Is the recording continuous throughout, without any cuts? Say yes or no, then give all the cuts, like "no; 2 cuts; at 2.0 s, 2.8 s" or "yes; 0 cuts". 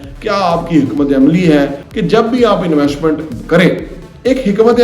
no; 1 cut; at 1.9 s